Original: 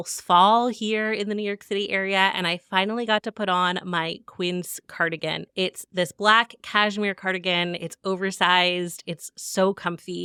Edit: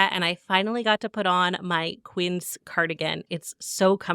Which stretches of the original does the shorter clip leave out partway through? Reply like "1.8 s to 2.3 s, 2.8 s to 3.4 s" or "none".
5.5 s to 9.0 s

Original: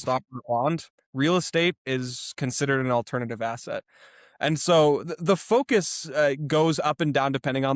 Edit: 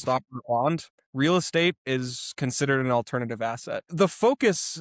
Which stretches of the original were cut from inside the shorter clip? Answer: 3.8 s to 5.1 s

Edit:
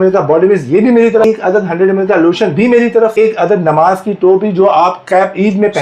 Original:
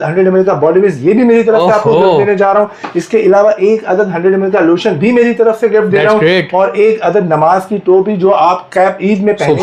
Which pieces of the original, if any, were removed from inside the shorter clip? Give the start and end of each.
1.6 s to 3.7 s, 5.6 s to 6.8 s

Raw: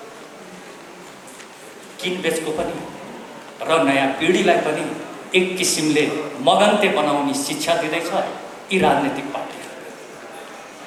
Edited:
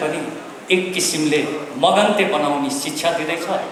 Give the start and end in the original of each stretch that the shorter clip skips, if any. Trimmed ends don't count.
none

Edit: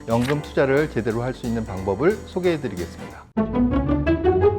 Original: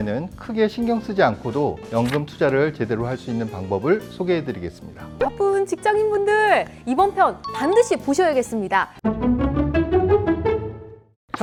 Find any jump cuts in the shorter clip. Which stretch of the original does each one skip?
5.1 s to 8.9 s

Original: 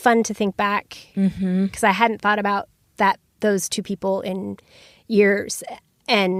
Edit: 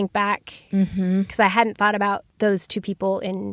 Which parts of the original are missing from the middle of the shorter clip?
2.7 s to 3.3 s

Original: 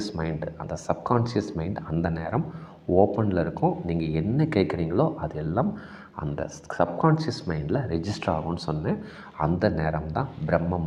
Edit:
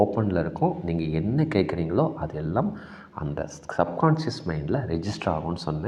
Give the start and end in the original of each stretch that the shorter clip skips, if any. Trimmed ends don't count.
none

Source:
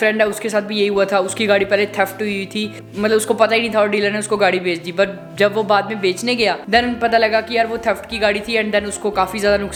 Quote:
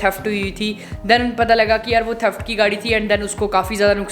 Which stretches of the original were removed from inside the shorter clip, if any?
2.9 s to 6.6 s

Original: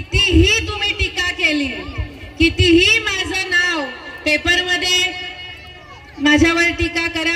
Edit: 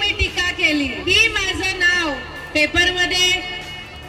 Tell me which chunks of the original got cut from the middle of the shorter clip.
2.0 s to 2.9 s

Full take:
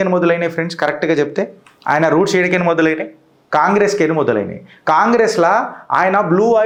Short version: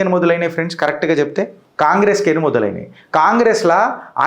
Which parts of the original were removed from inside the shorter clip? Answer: 1.6 s to 3.3 s

